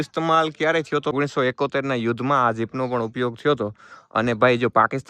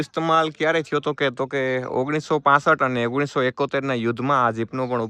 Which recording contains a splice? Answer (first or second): first